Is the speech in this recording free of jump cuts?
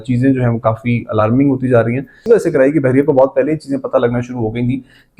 no; 1 cut; at 2.2 s

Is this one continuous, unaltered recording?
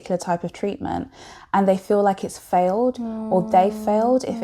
yes; 0 cuts

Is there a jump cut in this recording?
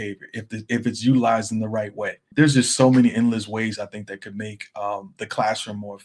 yes; 1 cut; at 2.2 s

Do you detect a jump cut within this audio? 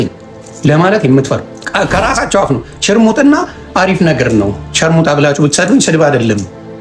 yes; 1 cut; at 1.6 s

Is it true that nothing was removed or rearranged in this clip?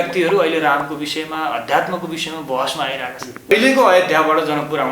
no; 1 cut; at 3.5 s

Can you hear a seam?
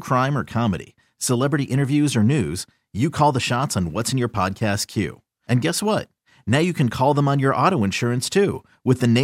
no; 0 cuts

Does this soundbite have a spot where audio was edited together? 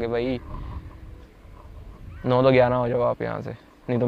no; 0 cuts

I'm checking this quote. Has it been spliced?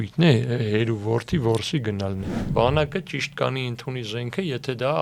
yes; 1 cut; at 2.4 s

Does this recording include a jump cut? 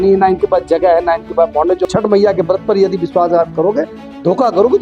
yes; 1 cut; at 1.9 s

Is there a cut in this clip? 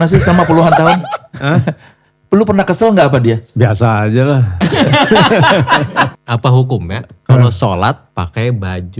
yes; 2 cuts; at 6.1 s, 8.0 s

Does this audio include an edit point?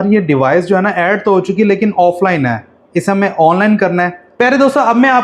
yes; 1 cut; at 4.2 s

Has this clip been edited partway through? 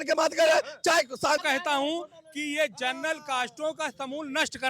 yes; 1 cut; at 1.4 s

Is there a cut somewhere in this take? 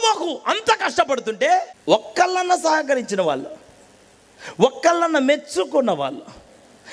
yes; 1 cut; at 1.7 s

